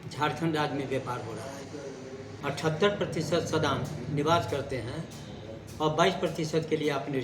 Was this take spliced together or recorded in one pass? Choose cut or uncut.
cut